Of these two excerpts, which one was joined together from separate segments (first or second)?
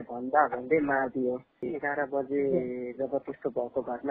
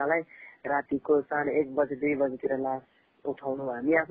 first